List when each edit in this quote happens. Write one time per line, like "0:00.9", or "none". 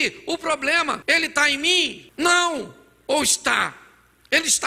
0:01.0
0:02.0